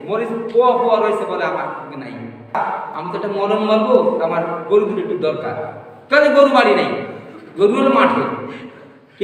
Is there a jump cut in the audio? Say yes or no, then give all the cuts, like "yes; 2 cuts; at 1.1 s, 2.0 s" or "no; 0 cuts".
yes; 1 cut; at 2.5 s